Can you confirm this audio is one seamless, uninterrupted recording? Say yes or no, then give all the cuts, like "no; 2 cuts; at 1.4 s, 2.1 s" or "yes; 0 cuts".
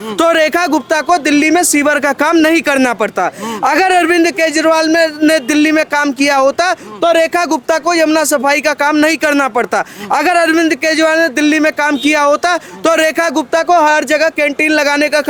yes; 0 cuts